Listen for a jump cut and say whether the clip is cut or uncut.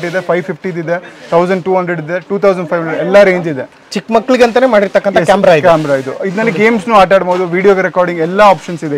uncut